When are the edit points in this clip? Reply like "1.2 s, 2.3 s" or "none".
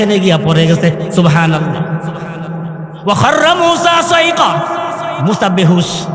none